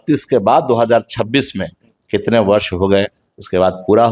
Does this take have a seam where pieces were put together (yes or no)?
no